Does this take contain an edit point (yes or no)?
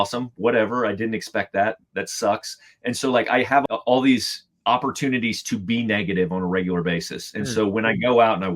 yes